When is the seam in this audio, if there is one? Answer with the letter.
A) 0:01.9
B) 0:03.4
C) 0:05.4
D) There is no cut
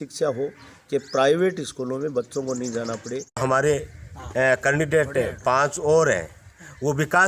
B